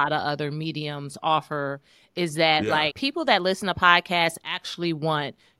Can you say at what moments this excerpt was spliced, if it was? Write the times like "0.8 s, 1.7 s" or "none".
3.0 s